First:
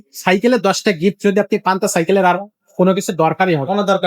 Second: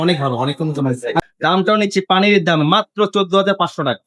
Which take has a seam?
second; 1 cut; at 1.2 s

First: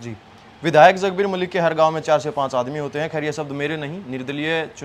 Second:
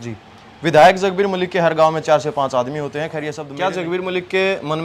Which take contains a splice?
second; 1 cut; at 3.4 s

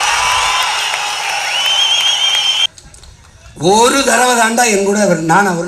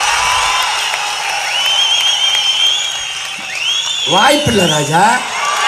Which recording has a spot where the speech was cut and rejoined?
first; 1 cut; at 2.7 s

